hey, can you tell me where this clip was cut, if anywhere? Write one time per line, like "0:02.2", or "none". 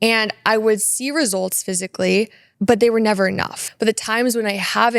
0:02.4
0:03.6